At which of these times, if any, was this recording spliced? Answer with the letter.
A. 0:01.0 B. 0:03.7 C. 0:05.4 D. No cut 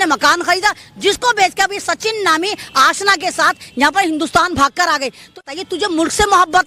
C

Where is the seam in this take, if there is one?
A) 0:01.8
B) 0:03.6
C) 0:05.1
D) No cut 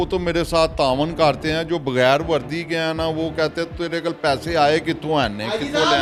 D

